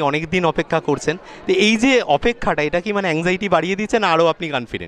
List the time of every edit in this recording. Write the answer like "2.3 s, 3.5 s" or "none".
none